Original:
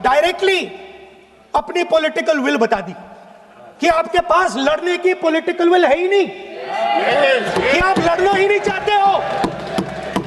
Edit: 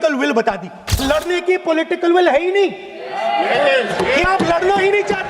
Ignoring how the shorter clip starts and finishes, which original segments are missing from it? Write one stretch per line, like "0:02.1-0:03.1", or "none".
0:03.2-0:04.6